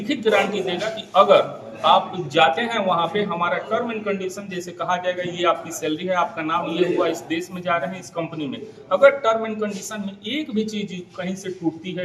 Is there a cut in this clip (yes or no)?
no